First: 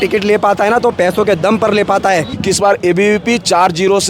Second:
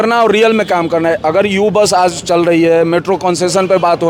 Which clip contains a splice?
first; 1 cut; at 2.3 s

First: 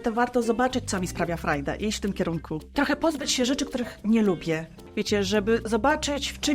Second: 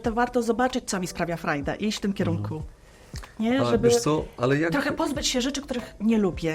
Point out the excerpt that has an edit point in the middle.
first; 2 cuts; at 2.8 s, 4.8 s

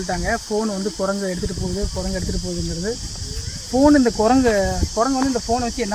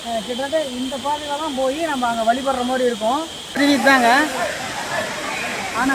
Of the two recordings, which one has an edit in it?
second; 1 cut; at 3.6 s

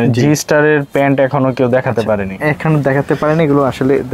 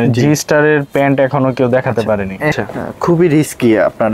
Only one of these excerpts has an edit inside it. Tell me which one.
second; 1 cut; at 2.6 s

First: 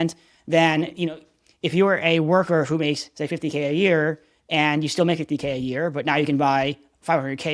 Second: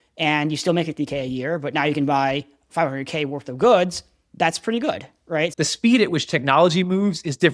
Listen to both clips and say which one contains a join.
second; 1 cut; at 5.5 s

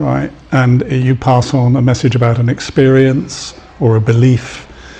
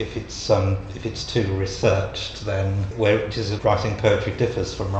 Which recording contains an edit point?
second; 2 cuts; at 2.9 s, 3.5 s

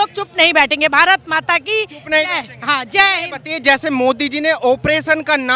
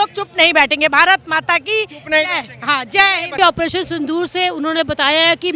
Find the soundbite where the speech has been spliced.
second; 1 cut; at 3.4 s

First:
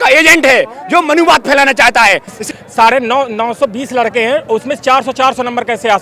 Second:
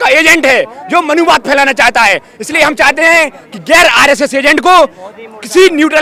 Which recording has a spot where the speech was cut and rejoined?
first; 1 cut; at 2.4 s

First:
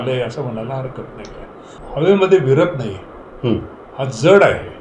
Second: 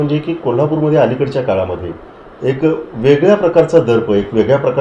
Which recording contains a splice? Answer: first; 1 cut; at 1.8 s

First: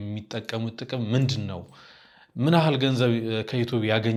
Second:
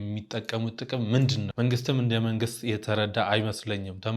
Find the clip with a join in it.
second; 1 cut; at 1.5 s

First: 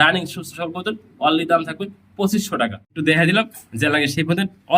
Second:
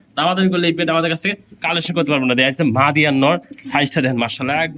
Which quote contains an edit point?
first; 1 cut; at 2.9 s

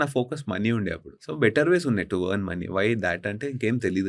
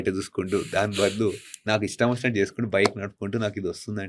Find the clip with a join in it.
first; 1 cut; at 1.2 s

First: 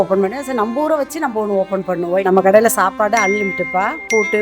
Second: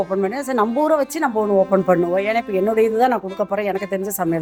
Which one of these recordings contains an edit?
first; 1 cut; at 2.2 s

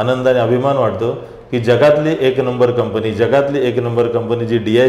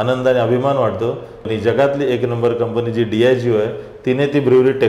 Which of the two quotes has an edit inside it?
second; 1 cut; at 1.4 s

